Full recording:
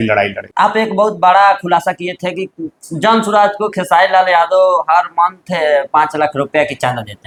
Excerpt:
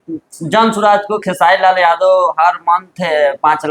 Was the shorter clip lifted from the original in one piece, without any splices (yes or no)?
yes